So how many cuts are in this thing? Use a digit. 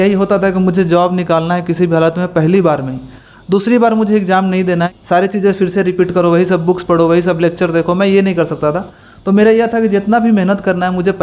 1